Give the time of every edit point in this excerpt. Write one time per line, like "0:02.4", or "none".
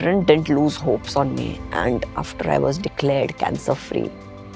0:02.2